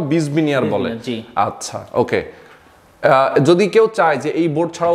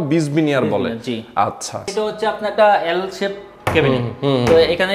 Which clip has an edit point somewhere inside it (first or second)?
second